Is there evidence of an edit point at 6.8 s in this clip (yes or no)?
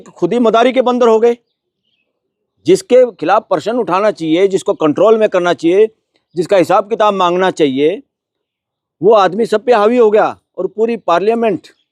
no